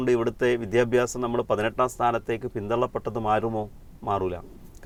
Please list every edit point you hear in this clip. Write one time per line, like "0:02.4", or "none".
none